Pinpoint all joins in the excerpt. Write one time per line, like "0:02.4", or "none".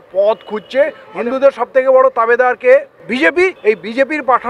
0:01.0
0:03.6

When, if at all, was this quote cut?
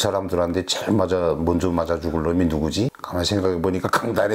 none

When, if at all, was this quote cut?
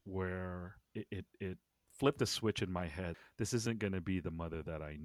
0:00.8
0:03.2

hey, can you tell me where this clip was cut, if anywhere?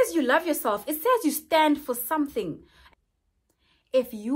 0:02.7

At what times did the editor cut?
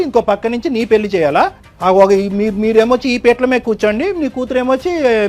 0:01.6

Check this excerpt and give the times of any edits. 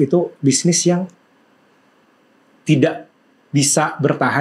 none

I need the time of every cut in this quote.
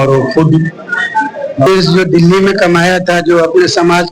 0:01.7

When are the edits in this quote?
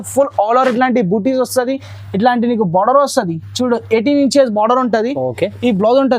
none

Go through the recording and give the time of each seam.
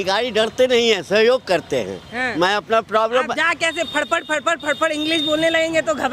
none

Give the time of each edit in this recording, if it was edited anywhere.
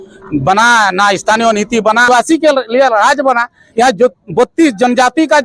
0:02.0

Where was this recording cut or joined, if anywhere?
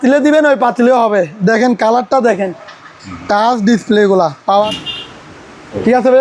0:04.7

